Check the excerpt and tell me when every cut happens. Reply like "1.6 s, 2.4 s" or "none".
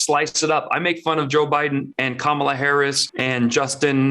1.9 s, 3.1 s